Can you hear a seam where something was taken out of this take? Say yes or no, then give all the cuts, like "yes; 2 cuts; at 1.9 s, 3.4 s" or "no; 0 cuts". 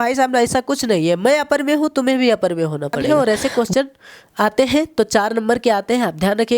yes; 1 cut; at 3.0 s